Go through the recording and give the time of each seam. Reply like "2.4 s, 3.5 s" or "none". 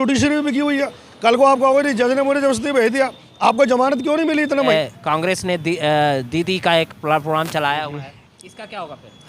4.7 s